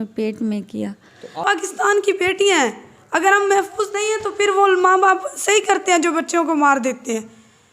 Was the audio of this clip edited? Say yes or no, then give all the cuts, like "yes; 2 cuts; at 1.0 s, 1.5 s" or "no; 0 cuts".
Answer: yes; 1 cut; at 1.4 s